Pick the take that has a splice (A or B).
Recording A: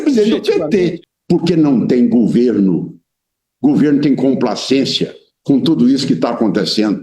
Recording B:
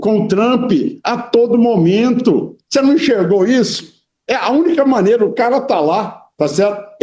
A